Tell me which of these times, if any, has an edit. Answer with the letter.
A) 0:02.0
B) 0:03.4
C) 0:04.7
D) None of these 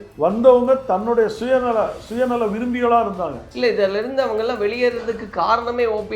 B